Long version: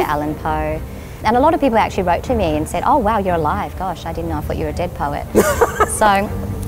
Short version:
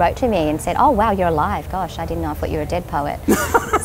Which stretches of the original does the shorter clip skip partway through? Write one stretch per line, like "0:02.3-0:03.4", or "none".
none